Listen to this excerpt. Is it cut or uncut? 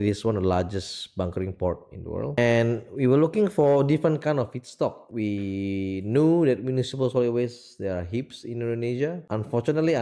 cut